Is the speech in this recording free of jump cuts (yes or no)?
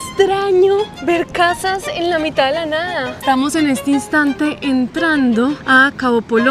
no